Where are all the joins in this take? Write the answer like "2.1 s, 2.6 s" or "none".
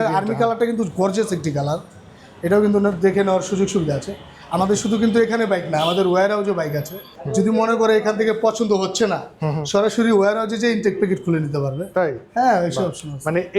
7.1 s